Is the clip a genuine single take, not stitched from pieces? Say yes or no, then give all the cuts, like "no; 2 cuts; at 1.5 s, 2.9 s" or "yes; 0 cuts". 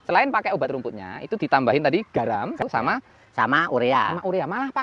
no; 1 cut; at 2.6 s